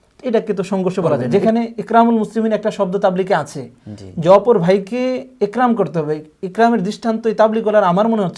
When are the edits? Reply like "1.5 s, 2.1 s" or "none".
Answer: 1.2 s